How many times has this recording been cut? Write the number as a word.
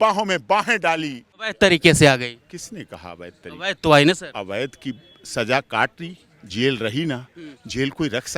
one